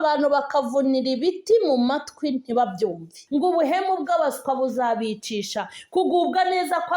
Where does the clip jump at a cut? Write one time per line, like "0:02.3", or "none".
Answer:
0:03.1